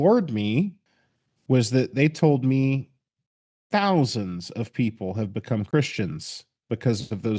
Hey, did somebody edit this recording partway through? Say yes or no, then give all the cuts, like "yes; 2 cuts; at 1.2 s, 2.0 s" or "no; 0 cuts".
yes; 1 cut; at 5.7 s